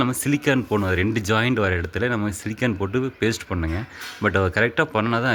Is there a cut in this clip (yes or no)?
no